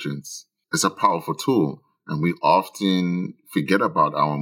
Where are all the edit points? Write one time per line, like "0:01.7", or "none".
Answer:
none